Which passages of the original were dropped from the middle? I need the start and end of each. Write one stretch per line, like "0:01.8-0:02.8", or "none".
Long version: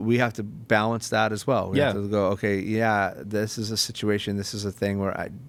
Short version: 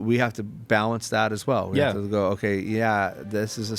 none